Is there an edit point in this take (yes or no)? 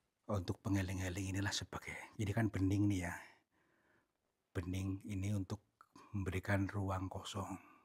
no